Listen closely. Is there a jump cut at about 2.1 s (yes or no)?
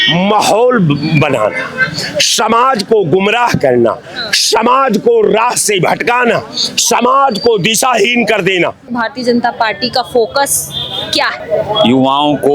no